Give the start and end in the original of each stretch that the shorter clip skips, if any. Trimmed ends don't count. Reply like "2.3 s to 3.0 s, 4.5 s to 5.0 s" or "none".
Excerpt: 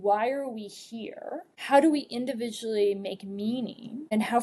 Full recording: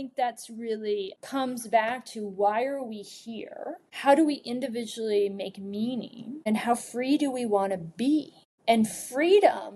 none